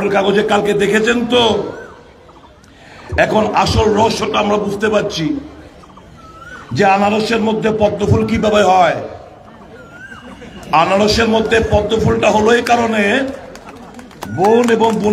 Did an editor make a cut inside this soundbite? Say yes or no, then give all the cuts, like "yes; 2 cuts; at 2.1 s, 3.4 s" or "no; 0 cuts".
no; 0 cuts